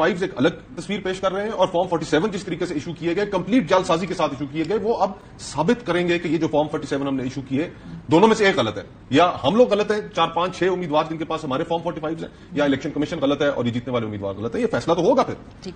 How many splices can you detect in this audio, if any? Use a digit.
0